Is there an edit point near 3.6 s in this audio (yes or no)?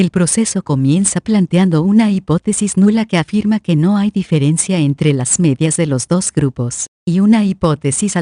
no